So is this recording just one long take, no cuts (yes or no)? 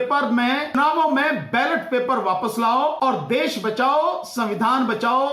no